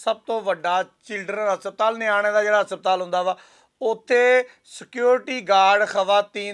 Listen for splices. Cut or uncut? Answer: uncut